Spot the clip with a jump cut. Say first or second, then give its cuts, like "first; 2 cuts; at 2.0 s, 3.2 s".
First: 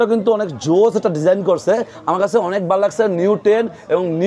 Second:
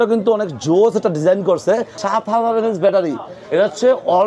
second; 1 cut; at 1.9 s